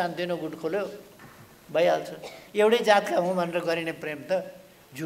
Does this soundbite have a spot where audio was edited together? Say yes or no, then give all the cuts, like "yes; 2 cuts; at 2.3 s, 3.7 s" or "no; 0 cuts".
yes; 1 cut; at 2.4 s